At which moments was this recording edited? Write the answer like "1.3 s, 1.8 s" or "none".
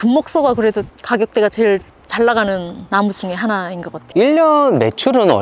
1.0 s, 3.9 s